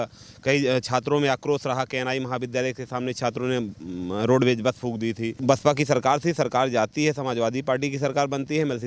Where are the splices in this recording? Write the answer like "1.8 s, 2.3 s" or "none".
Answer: 5.3 s